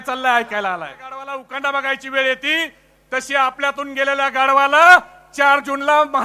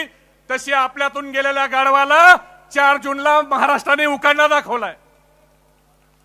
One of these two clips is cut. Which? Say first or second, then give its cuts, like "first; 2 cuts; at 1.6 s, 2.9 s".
first; 1 cut; at 1.4 s